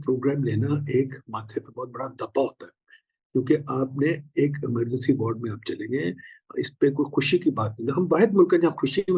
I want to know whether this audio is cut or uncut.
uncut